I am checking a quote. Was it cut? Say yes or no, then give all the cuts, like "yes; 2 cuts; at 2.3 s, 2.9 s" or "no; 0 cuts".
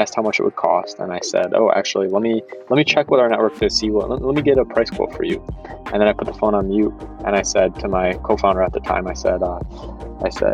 no; 0 cuts